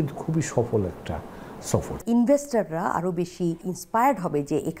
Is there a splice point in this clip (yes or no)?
yes